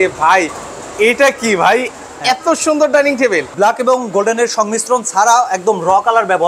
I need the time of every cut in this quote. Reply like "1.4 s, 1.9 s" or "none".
3.5 s